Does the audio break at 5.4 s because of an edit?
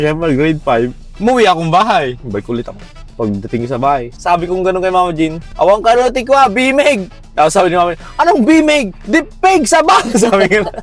yes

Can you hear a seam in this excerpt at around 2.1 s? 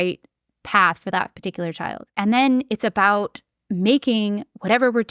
yes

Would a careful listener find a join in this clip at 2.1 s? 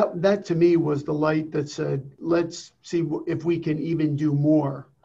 yes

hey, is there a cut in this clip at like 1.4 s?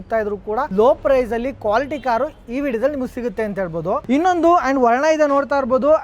no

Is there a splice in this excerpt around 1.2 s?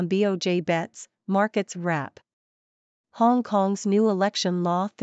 no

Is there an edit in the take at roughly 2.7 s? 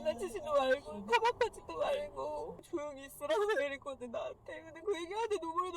yes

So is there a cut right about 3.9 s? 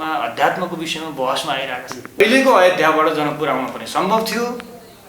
no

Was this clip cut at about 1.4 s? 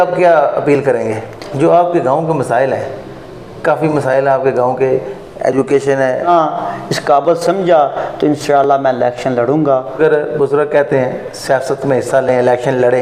yes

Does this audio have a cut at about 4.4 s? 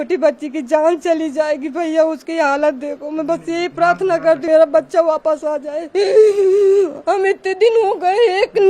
yes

